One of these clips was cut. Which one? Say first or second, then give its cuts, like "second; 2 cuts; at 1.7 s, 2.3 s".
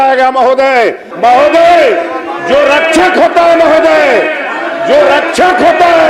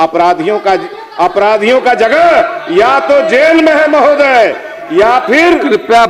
first; 1 cut; at 1.0 s